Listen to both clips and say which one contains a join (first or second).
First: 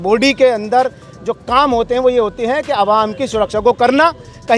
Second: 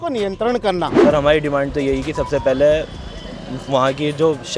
second